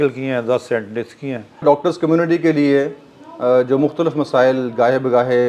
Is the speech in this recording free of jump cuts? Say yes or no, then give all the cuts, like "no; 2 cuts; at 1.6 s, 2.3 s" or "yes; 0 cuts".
no; 1 cut; at 1.6 s